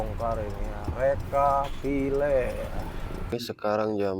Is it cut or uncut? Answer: cut